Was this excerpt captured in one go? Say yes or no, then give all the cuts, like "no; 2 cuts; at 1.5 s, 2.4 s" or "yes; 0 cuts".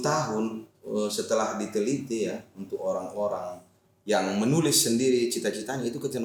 yes; 0 cuts